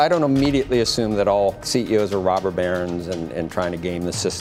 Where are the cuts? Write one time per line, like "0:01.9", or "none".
0:01.6